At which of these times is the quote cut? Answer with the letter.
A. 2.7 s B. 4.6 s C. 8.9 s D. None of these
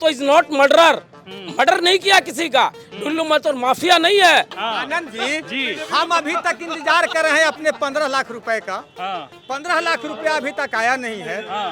B